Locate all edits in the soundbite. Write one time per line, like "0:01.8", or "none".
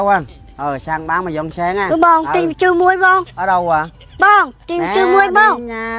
none